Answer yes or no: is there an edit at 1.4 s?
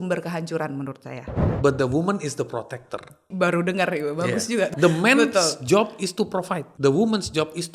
yes